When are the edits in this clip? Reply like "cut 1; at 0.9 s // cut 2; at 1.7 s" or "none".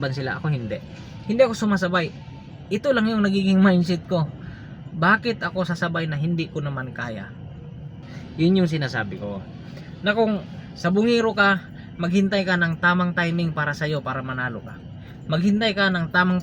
cut 1; at 8.2 s